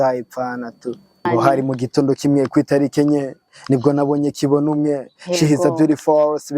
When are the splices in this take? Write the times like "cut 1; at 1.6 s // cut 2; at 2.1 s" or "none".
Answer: cut 1; at 1.2 s

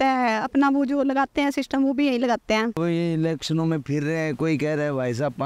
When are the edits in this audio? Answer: cut 1; at 2.8 s

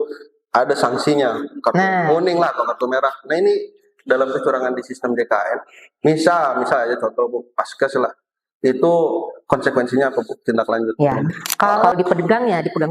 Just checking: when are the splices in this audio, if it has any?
cut 1; at 11.8 s

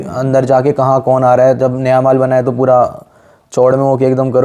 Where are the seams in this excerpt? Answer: none

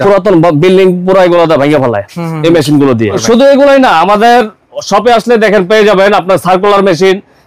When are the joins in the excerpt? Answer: cut 1; at 3.2 s

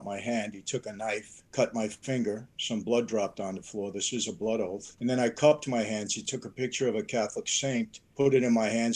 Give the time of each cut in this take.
cut 1; at 1.4 s // cut 2; at 4.9 s // cut 3; at 8.0 s

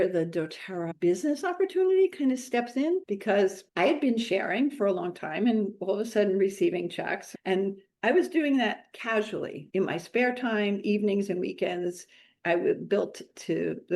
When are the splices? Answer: cut 1; at 0.9 s // cut 2; at 7.2 s

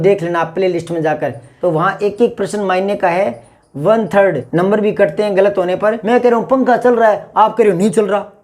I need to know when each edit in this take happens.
cut 1; at 1.4 s // cut 2; at 6.0 s

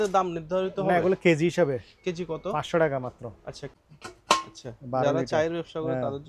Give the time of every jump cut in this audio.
cut 1; at 3.6 s

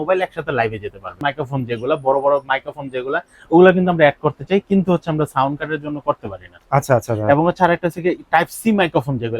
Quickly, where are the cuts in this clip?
cut 1; at 1.2 s

